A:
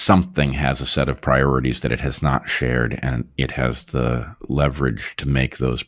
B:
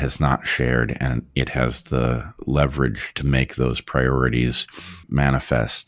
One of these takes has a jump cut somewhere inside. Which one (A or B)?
B